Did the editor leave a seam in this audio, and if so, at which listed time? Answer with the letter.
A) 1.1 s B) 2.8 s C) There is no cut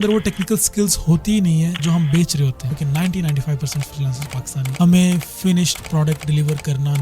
B